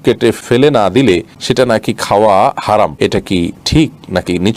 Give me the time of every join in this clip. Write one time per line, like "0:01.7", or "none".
0:01.4
0:03.5

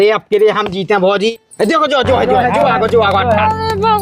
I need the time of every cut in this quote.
0:01.3

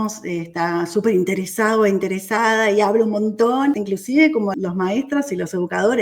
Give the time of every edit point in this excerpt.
0:03.8
0:04.5

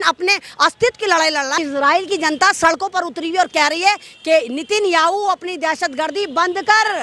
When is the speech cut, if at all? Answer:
0:01.6

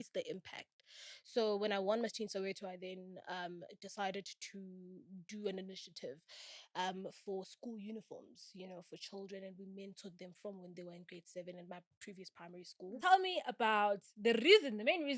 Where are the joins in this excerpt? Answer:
0:13.0

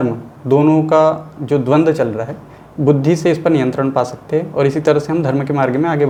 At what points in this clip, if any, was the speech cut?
none

